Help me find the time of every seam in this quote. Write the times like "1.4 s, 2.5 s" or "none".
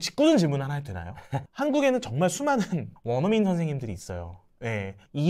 1.4 s